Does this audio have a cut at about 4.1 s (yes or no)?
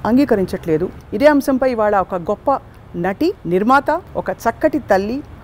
yes